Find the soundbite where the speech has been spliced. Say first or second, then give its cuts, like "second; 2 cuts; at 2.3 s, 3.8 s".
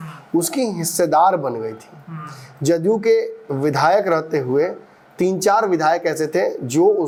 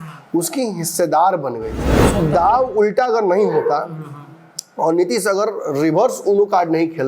second; 1 cut; at 2.0 s